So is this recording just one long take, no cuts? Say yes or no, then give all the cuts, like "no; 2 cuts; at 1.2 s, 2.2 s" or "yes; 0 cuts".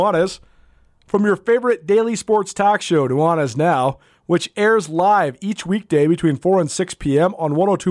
yes; 0 cuts